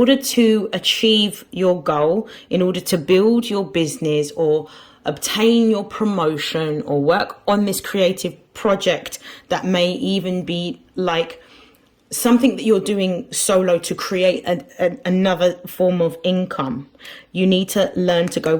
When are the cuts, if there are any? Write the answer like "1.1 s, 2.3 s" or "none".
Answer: none